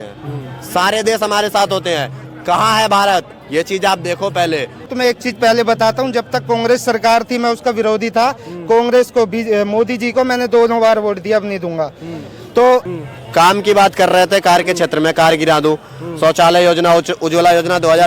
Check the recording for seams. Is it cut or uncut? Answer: cut